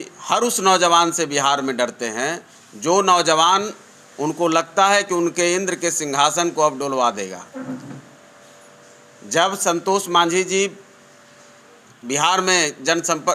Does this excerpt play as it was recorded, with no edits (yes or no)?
yes